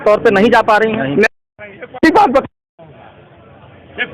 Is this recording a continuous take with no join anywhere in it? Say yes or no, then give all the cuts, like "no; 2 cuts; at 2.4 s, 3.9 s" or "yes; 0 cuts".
yes; 0 cuts